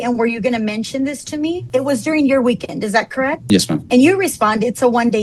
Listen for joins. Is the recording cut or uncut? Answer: cut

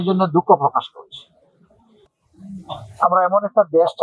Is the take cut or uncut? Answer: cut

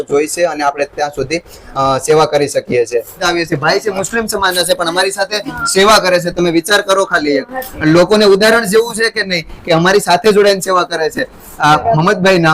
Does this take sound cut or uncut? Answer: cut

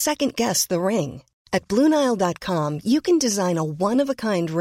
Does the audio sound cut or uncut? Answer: uncut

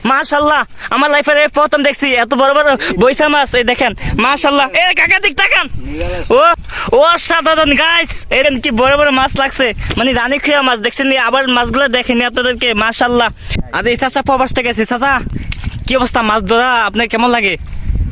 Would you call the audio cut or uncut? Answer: cut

